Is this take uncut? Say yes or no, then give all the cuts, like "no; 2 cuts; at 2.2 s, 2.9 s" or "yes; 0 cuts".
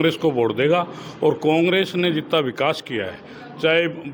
yes; 0 cuts